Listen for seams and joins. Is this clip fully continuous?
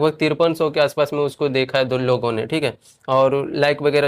yes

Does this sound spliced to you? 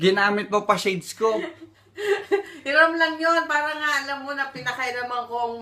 no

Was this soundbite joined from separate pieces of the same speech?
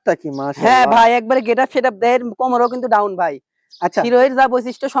no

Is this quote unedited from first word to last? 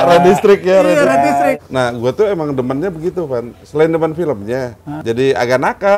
no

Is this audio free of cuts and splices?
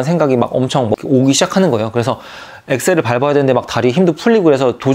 yes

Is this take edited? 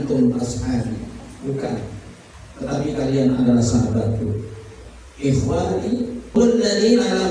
yes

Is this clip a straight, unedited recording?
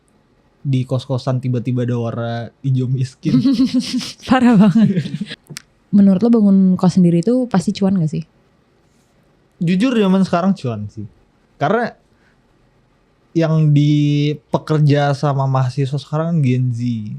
no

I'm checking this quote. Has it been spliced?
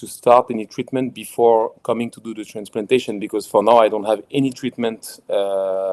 no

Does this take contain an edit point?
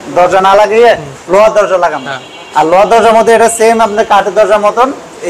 no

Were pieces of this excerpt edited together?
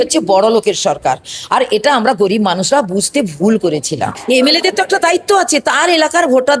yes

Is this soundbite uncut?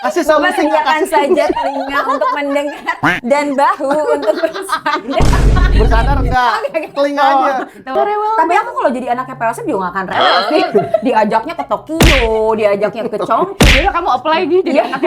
no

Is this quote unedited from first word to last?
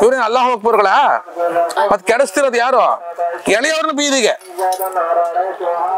yes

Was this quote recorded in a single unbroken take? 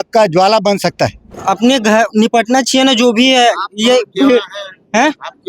no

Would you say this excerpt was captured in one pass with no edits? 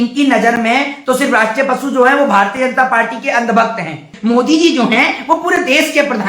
no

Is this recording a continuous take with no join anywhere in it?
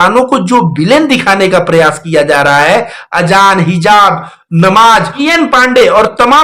no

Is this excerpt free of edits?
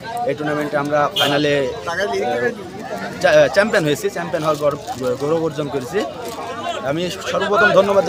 yes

